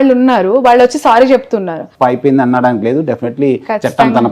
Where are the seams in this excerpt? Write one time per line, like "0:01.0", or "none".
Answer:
0:01.8